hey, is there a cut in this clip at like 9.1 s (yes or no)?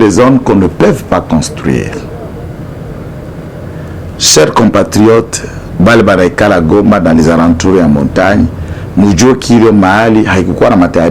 no